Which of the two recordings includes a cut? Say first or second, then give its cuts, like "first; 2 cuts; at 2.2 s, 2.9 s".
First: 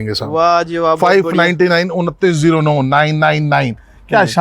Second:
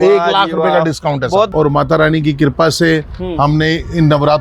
second; 1 cut; at 1.5 s